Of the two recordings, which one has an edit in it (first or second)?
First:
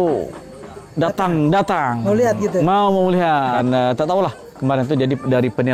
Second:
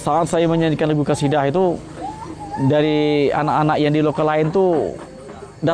first